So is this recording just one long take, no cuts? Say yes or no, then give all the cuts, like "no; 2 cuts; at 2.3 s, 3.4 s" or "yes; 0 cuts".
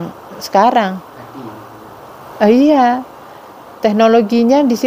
yes; 0 cuts